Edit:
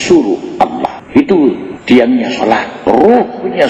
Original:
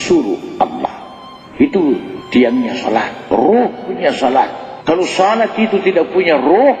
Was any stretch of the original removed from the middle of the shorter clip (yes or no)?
yes